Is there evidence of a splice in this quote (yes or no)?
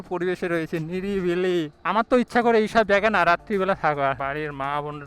yes